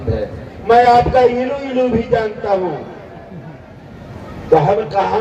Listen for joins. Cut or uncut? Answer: uncut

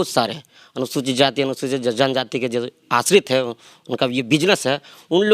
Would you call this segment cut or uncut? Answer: uncut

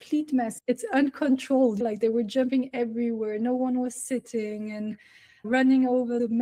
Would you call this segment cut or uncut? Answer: uncut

